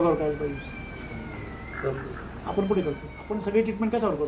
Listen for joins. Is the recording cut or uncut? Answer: cut